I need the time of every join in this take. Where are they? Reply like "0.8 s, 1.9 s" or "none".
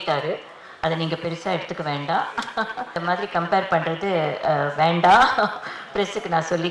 3.0 s